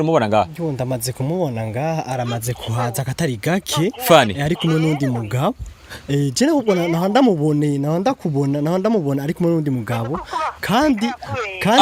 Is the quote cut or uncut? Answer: uncut